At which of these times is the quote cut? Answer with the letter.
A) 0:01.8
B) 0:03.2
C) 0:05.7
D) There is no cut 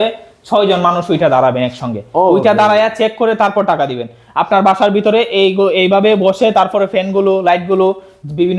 D